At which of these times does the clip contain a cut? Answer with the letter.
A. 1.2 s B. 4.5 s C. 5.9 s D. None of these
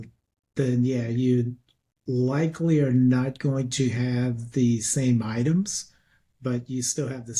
D